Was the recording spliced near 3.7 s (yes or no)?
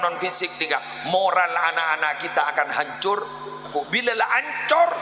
yes